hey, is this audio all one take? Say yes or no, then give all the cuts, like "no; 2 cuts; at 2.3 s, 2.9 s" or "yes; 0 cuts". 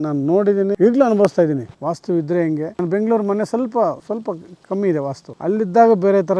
no; 5 cuts; at 0.8 s, 1.7 s, 2.7 s, 4.0 s, 5.3 s